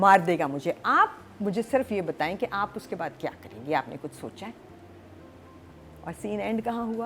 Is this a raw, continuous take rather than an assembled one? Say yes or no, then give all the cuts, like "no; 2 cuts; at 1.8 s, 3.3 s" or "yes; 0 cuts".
yes; 0 cuts